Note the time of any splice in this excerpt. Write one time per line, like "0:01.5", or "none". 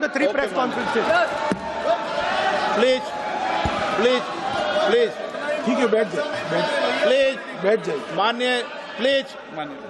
none